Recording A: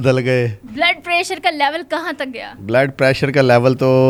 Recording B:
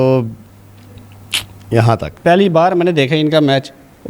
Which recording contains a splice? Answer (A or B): B